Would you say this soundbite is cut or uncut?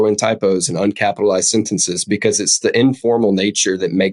uncut